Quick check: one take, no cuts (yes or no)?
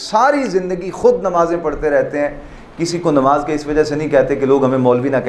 yes